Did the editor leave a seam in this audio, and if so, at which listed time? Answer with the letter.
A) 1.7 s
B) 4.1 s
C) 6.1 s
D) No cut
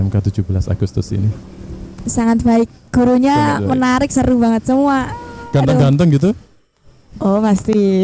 D